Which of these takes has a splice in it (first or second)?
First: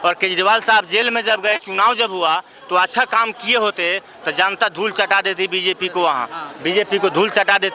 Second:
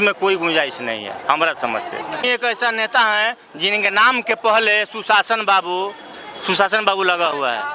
second